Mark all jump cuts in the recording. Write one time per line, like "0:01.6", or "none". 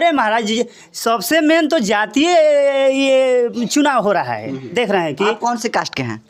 none